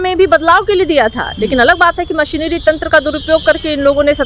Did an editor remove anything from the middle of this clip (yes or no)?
no